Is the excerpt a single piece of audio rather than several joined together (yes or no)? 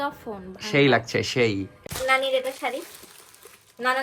no